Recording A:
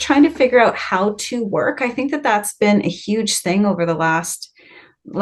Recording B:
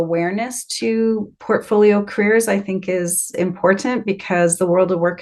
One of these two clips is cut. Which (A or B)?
B